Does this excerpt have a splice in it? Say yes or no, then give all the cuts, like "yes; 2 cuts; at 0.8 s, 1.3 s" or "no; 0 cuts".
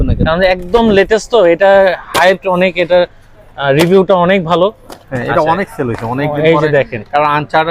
no; 0 cuts